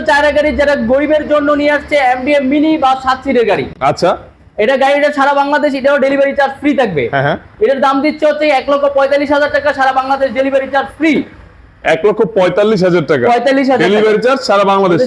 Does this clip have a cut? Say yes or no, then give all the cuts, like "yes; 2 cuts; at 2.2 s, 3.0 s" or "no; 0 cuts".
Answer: no; 0 cuts